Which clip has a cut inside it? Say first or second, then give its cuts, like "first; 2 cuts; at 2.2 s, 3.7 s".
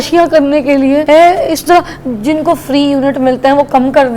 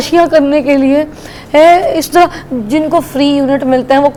first; 1 cut; at 1.0 s